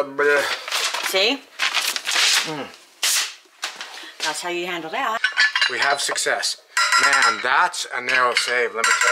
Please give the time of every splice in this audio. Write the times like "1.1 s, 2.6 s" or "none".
5.3 s